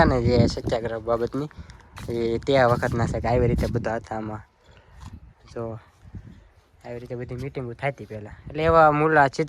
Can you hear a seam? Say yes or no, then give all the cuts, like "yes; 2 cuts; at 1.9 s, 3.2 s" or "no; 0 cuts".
no; 0 cuts